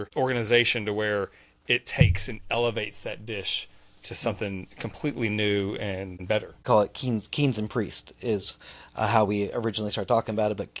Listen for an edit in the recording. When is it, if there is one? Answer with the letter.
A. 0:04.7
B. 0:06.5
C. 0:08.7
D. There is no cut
B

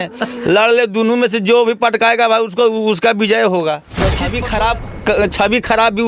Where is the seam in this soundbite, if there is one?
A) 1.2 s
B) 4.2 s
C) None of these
B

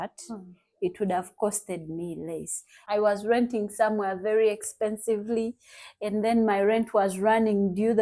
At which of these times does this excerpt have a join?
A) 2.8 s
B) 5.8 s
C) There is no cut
A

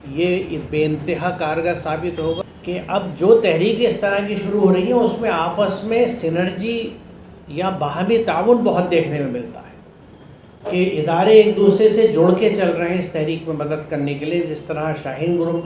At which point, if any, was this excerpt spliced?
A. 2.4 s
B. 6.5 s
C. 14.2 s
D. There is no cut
A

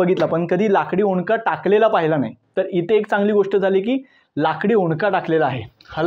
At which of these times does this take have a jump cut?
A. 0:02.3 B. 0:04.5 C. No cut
C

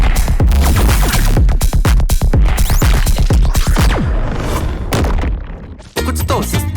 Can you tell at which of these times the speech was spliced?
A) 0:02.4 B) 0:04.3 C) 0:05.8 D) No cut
C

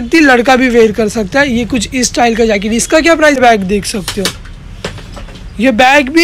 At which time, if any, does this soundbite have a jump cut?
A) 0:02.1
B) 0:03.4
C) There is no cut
B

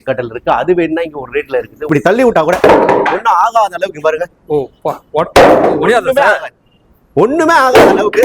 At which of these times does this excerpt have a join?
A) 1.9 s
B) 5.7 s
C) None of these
A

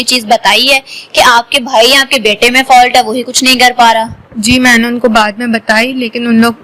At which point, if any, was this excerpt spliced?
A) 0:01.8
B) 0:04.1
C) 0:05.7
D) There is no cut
D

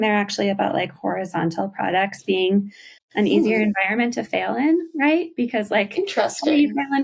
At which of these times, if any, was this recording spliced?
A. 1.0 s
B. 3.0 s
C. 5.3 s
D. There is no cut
D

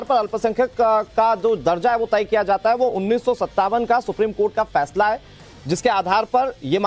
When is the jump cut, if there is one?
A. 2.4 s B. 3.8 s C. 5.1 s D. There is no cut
D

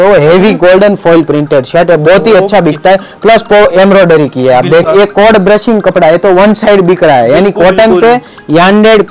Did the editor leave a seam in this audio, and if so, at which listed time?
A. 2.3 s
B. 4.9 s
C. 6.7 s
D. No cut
B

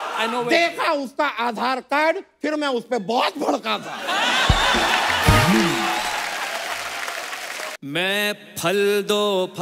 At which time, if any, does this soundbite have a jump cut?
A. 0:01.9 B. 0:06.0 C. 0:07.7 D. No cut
C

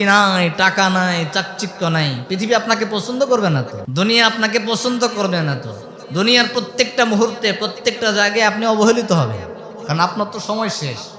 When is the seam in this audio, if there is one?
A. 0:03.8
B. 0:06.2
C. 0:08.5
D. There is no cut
A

